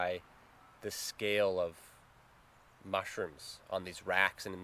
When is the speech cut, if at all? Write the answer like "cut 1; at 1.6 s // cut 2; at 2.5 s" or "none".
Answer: none